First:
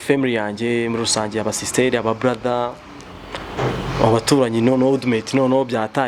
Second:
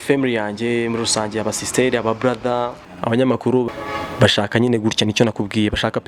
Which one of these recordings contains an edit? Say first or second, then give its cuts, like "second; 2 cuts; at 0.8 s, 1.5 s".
second; 2 cuts; at 2.9 s, 3.8 s